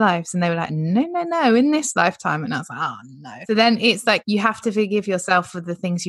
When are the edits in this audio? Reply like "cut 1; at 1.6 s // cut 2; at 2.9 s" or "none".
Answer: cut 1; at 3.4 s // cut 2; at 4.2 s